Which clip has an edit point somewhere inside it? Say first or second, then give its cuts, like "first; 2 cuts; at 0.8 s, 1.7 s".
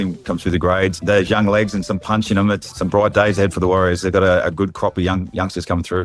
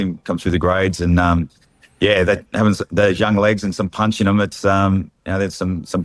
first; 2 cuts; at 1.0 s, 2.7 s